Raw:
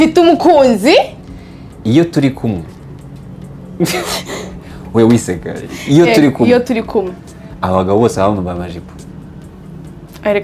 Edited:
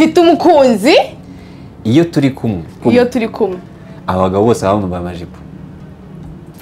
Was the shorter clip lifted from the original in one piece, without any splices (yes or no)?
no